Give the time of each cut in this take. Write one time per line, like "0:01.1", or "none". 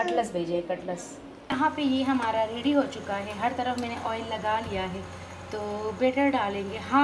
0:01.5